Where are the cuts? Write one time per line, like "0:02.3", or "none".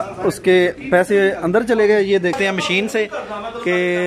0:02.4